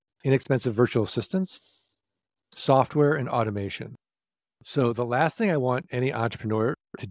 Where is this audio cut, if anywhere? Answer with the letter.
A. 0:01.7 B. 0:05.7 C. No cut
C